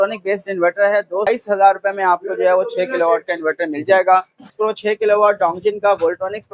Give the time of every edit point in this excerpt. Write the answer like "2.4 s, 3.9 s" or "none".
1.3 s, 4.5 s